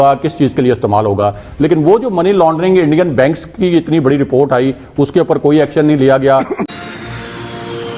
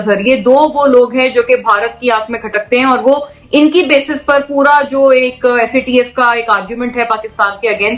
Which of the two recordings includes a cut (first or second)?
first